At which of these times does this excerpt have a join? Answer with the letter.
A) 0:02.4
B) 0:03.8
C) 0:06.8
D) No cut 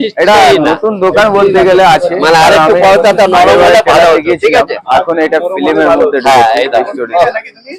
D